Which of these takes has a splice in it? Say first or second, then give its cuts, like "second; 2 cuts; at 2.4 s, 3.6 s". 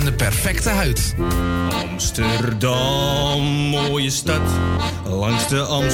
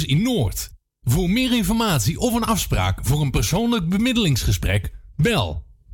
first; 1 cut; at 1.1 s